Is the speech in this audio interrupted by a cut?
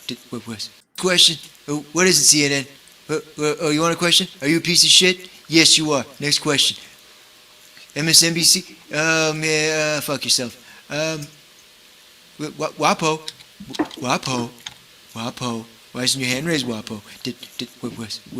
yes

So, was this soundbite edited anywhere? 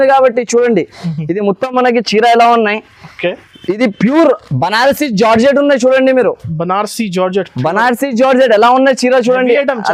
no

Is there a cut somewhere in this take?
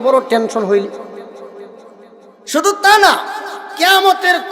no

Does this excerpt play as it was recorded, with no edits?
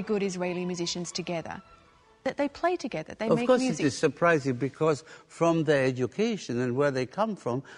yes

